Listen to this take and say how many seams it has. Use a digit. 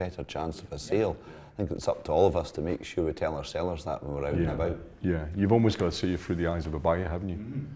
0